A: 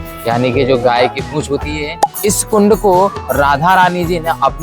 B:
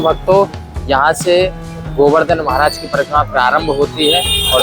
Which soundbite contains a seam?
A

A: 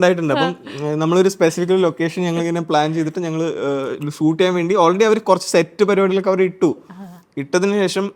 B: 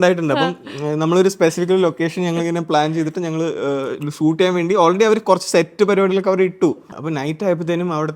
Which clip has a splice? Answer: B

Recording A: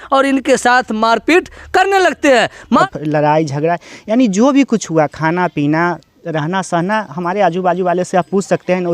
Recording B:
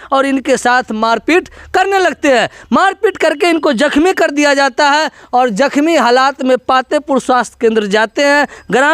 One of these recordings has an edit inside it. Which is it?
A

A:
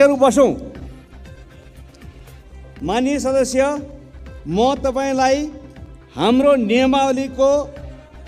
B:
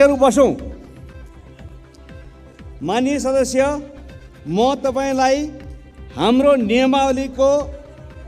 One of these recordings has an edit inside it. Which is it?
B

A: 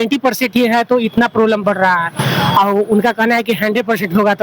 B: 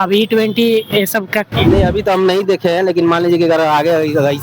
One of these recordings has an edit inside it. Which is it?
B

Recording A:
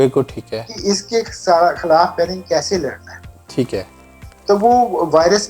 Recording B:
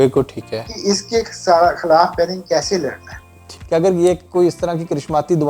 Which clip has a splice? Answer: B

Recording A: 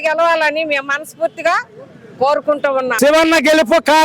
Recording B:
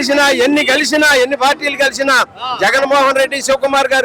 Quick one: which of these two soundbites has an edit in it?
A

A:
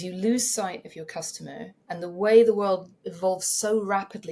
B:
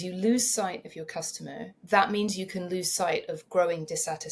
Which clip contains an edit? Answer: B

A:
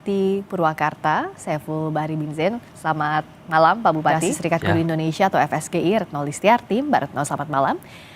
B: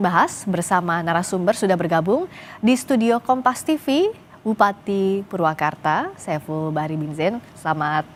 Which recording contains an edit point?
A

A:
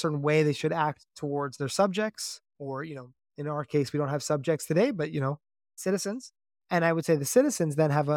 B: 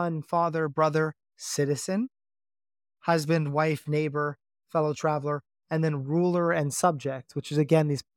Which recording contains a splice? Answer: A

